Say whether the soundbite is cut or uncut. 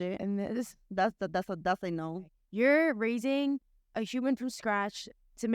cut